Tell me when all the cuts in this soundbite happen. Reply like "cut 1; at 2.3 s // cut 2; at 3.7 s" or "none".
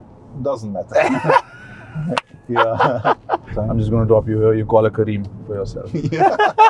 cut 1; at 3.5 s

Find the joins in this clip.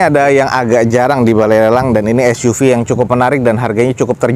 none

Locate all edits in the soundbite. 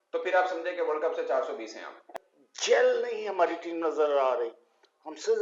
cut 1; at 2.1 s

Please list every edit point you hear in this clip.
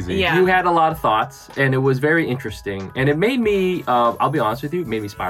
none

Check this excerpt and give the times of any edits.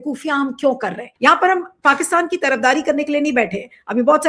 cut 1; at 1.1 s

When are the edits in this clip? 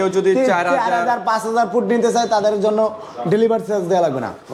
none

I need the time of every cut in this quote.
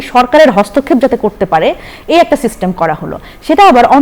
none

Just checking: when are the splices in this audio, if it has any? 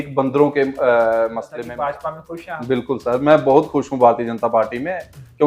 cut 1; at 1.7 s

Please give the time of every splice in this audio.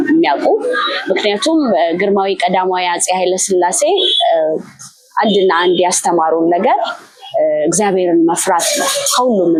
none

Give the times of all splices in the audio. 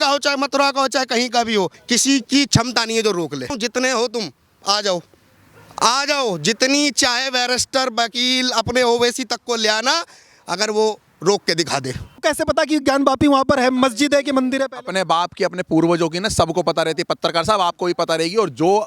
cut 1; at 1.8 s // cut 2; at 3.5 s // cut 3; at 12.2 s

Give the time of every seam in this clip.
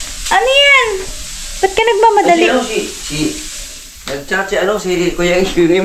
none

